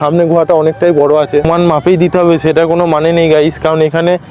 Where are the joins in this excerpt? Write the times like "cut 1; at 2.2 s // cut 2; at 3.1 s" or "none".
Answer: cut 1; at 1.5 s